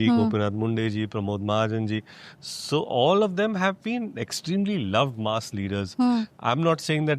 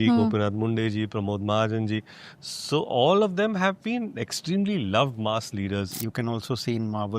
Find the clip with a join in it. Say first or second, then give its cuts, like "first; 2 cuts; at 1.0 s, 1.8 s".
second; 1 cut; at 5.9 s